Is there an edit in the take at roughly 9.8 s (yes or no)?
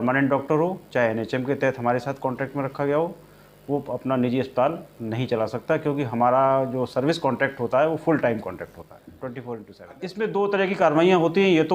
yes